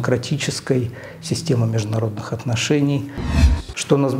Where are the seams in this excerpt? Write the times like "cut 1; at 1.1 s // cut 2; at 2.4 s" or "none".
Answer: cut 1; at 3.3 s